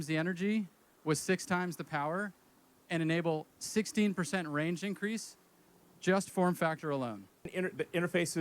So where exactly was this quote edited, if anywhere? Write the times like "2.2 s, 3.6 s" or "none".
7.4 s

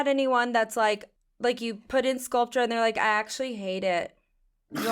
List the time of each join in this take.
1.1 s

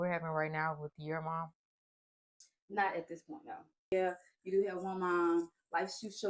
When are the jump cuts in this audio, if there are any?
3.9 s

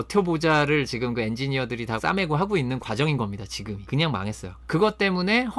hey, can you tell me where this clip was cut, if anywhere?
2.0 s, 3.8 s, 4.5 s

